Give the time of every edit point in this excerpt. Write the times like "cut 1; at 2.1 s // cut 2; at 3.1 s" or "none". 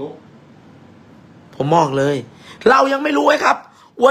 none